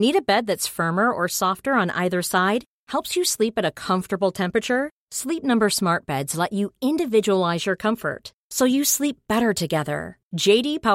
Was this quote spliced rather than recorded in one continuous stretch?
no; 0 cuts

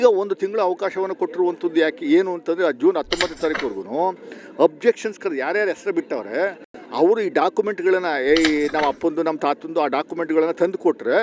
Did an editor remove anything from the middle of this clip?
no; 0 cuts

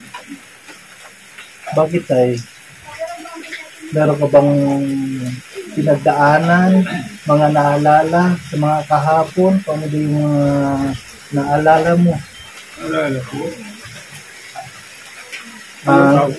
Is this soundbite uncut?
no; 1 cut; at 12.8 s

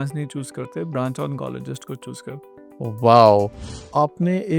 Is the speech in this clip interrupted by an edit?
yes; 1 cut; at 3.6 s

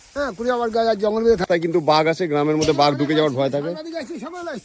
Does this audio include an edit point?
yes; 1 cut; at 1.4 s

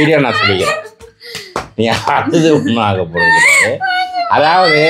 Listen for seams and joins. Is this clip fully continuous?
yes; 0 cuts

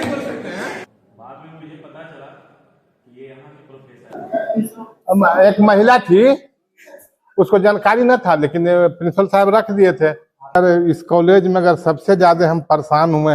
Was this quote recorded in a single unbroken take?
no; 3 cuts; at 0.9 s, 4.1 s, 10.6 s

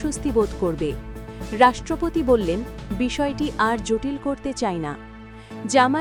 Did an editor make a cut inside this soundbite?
no; 0 cuts

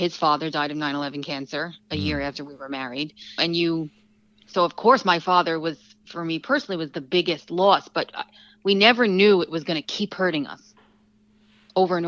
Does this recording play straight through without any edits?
yes; 0 cuts

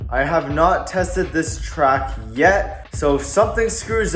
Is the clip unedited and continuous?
no; 1 cut; at 2.8 s

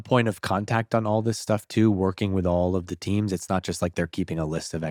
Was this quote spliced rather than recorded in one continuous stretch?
no; 0 cuts

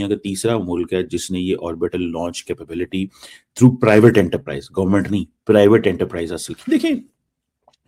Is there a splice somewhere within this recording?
no; 0 cuts

